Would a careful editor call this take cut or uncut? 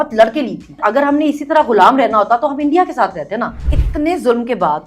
cut